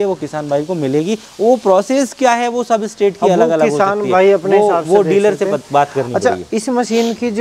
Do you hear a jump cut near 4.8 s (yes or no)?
no